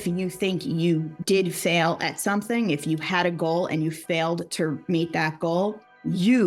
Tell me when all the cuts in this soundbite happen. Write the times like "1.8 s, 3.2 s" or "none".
1.1 s